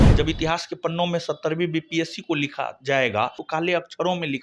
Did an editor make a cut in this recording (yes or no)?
yes